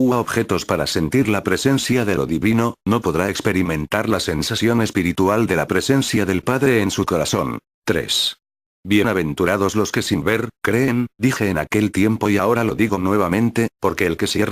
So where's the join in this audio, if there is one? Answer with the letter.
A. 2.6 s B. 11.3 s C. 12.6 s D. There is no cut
B